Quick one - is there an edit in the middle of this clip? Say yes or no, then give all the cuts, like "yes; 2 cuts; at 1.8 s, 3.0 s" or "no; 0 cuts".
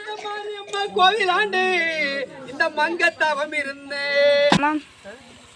yes; 1 cut; at 4.6 s